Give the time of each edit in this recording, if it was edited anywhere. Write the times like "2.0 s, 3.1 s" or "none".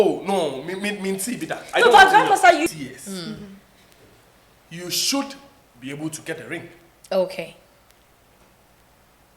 2.7 s